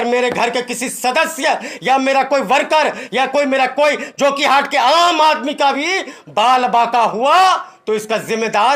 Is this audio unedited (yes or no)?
yes